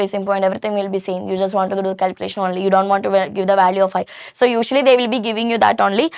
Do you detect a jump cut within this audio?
no; 0 cuts

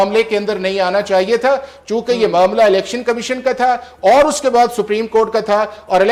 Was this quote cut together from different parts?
no; 0 cuts

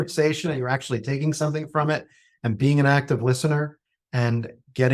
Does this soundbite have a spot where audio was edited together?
no; 0 cuts

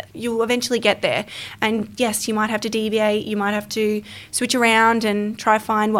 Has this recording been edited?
no; 0 cuts

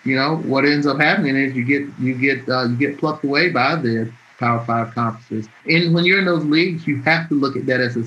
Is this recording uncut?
no; 1 cut; at 5.6 s

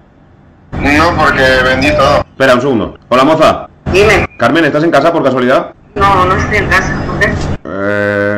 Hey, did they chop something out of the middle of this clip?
yes; 3 cuts; at 3.0 s, 3.7 s, 5.8 s

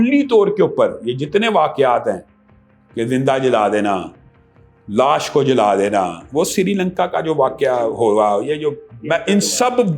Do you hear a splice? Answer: no; 0 cuts

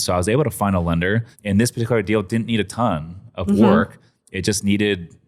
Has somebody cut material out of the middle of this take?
yes; 1 cut; at 1.3 s

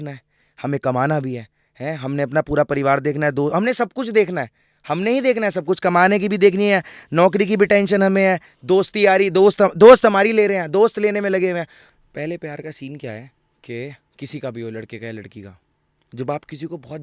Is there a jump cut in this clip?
yes; 1 cut; at 11.8 s

